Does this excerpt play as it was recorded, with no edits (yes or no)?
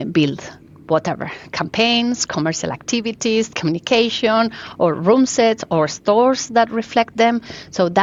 yes